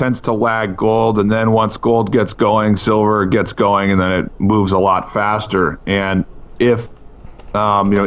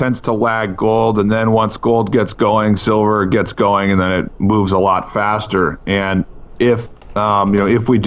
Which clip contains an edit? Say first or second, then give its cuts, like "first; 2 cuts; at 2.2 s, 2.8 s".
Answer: second; 1 cut; at 7.0 s